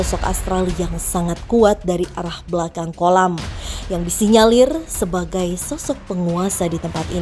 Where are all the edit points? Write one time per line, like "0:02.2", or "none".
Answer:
none